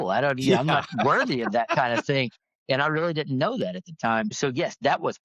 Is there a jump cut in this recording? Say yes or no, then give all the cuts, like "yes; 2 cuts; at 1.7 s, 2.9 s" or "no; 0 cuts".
yes; 1 cut; at 4.3 s